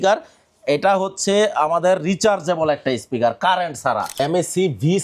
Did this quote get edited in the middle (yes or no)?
yes